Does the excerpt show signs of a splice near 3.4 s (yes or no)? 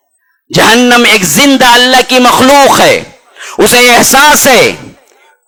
no